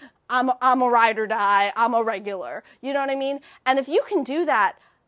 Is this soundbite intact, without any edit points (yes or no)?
yes